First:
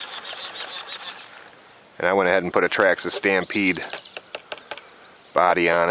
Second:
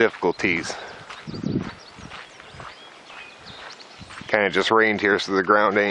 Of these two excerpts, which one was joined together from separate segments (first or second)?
first